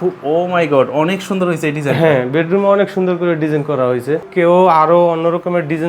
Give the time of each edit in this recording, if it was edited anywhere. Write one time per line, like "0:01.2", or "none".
0:04.2